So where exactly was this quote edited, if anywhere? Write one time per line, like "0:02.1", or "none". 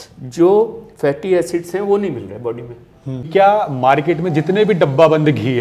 0:03.3